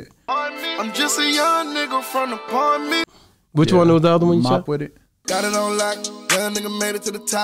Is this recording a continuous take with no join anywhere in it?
no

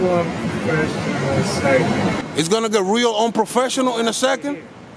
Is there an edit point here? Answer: no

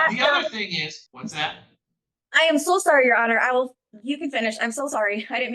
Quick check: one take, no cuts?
no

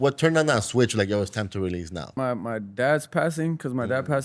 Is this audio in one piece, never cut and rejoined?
no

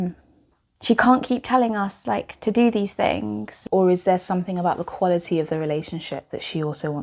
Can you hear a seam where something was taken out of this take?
yes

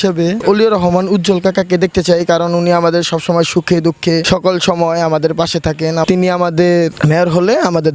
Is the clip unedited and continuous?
yes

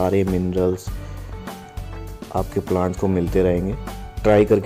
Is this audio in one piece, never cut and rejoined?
yes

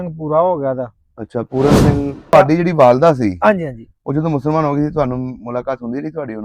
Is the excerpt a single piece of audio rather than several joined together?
no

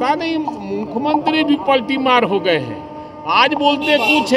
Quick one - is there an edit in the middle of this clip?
no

